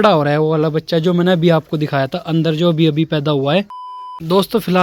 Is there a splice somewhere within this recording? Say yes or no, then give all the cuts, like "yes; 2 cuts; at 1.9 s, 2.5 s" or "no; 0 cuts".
yes; 1 cut; at 3.7 s